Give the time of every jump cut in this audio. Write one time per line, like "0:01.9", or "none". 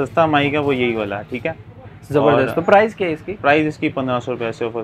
none